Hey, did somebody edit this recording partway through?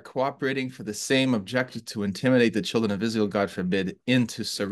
no; 0 cuts

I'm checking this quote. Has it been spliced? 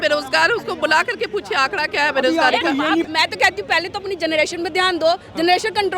yes; 1 cut; at 3.1 s

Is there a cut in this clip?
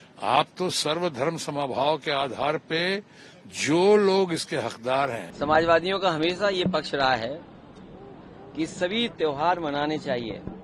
yes; 1 cut; at 5.3 s

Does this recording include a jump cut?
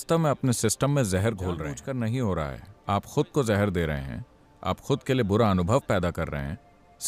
yes; 1 cut; at 1.8 s

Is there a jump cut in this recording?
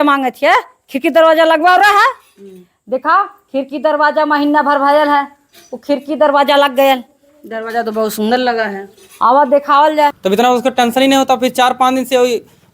yes; 1 cut; at 10.2 s

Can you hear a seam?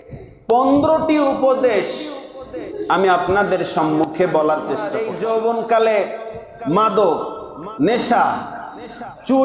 yes; 1 cut; at 5.0 s

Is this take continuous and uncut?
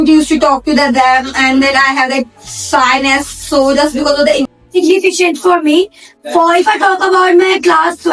no; 1 cut; at 4.5 s

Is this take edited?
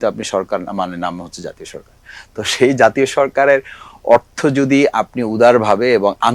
no; 0 cuts

